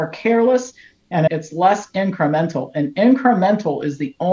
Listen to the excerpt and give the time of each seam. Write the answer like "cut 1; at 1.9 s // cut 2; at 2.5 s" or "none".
cut 1; at 1.3 s